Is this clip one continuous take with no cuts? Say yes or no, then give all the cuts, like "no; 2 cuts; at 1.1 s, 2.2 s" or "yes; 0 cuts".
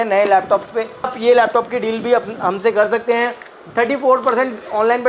no; 1 cut; at 1.1 s